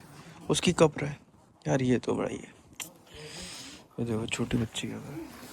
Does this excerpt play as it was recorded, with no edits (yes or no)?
yes